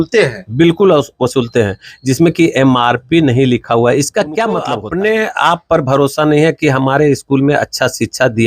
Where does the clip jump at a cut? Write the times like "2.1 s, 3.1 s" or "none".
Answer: 4.7 s